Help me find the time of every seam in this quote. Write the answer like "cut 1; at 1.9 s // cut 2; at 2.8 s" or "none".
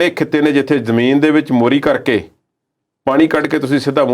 none